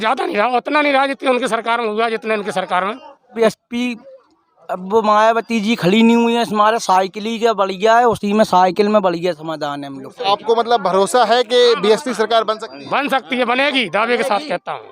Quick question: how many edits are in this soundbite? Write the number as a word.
two